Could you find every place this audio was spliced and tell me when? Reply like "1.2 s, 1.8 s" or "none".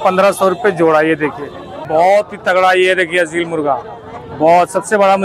1.8 s